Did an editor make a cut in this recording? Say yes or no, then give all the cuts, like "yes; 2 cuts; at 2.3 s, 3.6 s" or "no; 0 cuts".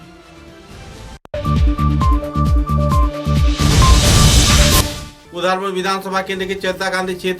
yes; 2 cuts; at 1.2 s, 4.8 s